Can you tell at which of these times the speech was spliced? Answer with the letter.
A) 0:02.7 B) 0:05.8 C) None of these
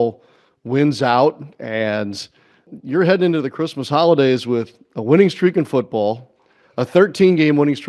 A